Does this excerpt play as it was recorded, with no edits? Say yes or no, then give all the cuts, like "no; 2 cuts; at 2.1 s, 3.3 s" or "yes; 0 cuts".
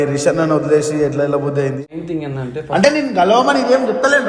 no; 1 cut; at 1.8 s